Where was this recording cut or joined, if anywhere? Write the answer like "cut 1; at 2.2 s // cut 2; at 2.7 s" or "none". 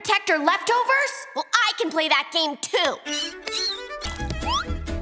cut 1; at 4.1 s